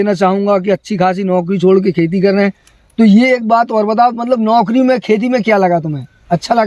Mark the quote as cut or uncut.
uncut